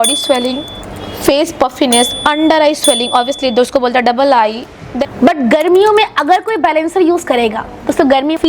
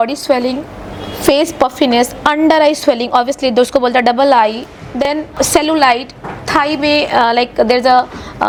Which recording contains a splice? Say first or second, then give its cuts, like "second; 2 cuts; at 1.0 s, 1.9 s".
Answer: first; 1 cut; at 5.1 s